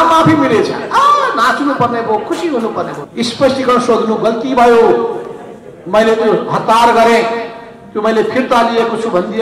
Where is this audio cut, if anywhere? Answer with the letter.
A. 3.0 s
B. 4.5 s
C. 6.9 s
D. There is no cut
A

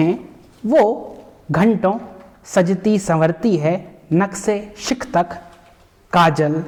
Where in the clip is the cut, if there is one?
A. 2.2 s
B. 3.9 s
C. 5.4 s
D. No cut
D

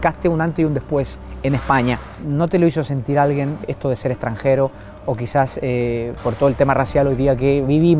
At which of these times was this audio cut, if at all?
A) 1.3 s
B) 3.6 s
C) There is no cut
B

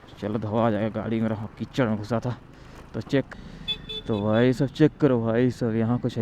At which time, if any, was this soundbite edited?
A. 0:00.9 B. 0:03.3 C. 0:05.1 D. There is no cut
B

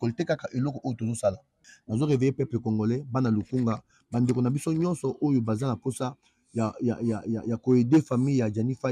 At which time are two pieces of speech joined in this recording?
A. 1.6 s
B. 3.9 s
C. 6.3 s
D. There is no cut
A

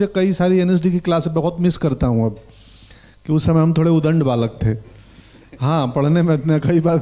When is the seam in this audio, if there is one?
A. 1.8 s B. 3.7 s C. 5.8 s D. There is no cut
D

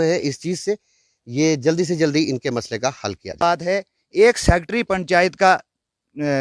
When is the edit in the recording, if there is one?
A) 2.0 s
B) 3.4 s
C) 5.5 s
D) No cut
B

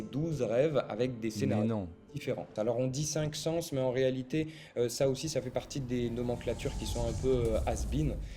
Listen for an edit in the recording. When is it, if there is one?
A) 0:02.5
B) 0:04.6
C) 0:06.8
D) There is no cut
A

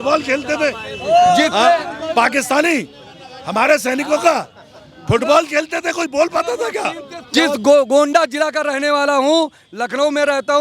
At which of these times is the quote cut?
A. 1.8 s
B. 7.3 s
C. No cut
B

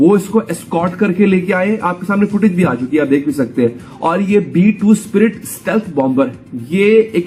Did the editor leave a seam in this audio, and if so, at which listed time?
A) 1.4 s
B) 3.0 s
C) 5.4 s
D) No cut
D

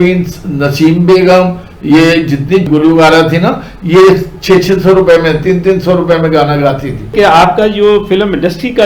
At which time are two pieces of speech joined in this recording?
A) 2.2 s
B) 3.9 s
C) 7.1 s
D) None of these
C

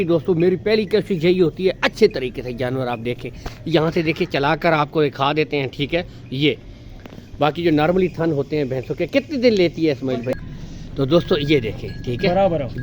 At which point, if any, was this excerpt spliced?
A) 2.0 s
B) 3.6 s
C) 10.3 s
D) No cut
C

